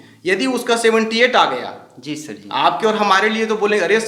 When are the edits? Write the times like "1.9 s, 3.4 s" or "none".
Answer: none